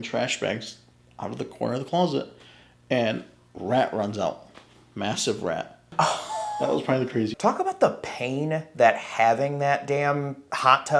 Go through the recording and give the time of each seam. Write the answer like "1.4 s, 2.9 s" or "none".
7.3 s